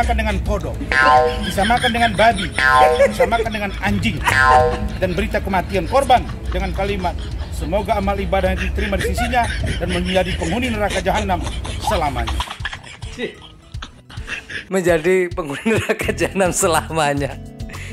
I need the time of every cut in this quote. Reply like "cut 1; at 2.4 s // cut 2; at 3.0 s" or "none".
none